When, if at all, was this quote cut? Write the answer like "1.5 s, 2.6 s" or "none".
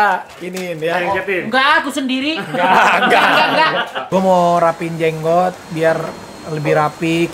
4.0 s